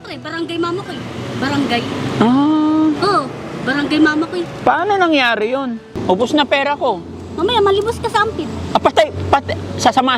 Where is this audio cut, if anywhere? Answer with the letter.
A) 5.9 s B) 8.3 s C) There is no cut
A